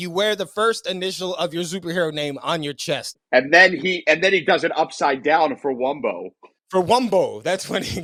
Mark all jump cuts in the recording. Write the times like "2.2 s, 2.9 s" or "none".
none